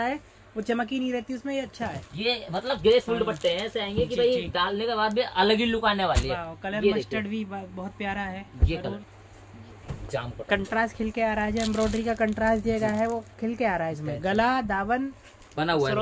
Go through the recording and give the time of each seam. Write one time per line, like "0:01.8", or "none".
0:09.0